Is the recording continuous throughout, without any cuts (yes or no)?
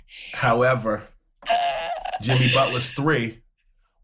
yes